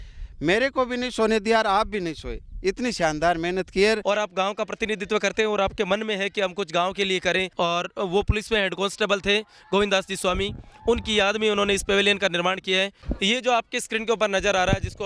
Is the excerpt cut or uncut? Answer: cut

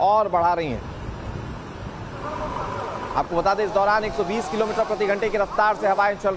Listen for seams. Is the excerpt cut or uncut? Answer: uncut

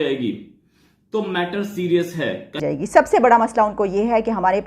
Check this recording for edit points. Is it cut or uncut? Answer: cut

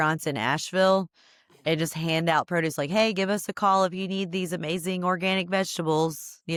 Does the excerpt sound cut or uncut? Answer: uncut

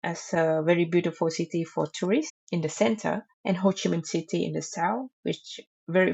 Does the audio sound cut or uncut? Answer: uncut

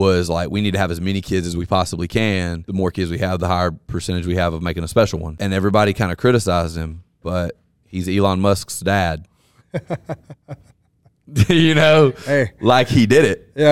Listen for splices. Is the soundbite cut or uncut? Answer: cut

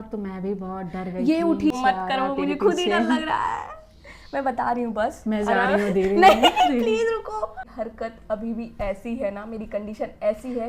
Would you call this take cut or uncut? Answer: cut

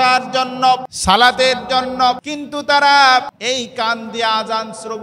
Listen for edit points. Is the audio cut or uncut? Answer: cut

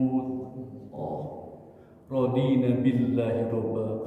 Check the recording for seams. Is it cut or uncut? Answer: cut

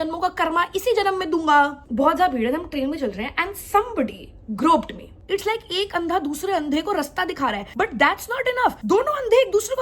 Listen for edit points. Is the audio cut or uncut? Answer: cut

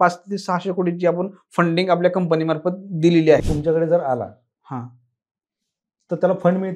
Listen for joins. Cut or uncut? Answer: cut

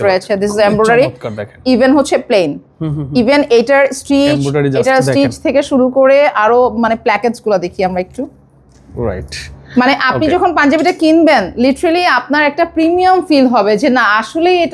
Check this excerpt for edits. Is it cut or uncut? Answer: uncut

